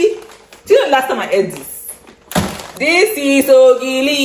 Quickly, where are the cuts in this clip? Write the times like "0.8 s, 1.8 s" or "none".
2.6 s